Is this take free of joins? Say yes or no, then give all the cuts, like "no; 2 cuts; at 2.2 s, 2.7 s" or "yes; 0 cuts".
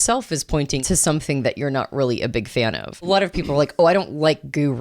no; 2 cuts; at 0.8 s, 3.1 s